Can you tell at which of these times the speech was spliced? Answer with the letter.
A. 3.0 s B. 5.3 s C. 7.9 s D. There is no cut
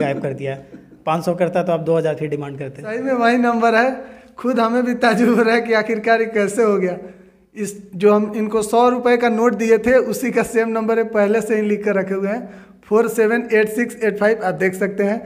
A